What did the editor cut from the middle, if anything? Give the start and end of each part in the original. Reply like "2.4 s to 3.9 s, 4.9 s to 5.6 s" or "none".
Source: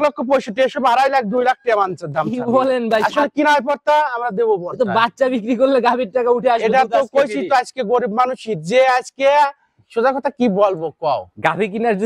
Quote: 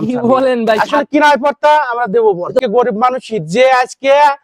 4.9 s to 7.8 s